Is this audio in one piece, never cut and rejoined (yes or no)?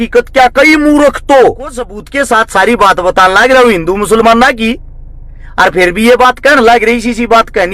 no